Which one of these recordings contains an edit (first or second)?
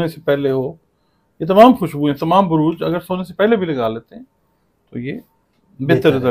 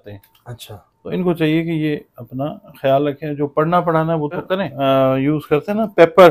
second